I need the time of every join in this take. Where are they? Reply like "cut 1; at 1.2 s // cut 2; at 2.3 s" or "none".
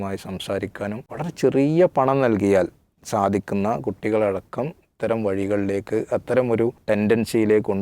cut 1; at 1.1 s // cut 2; at 6.8 s